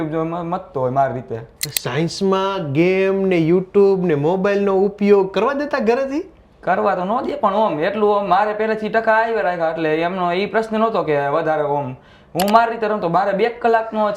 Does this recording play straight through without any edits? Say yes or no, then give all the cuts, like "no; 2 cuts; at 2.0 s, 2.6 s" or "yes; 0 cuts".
no; 1 cut; at 1.6 s